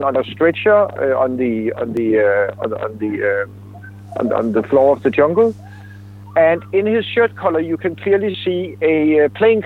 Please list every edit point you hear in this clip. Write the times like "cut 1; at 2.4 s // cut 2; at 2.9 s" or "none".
none